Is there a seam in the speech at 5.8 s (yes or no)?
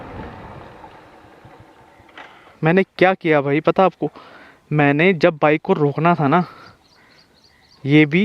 no